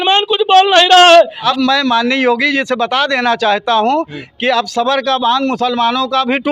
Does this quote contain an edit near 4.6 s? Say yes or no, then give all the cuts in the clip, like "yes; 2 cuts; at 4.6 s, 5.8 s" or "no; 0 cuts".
no; 1 cut; at 1.4 s